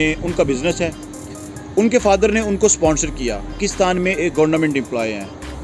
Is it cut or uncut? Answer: cut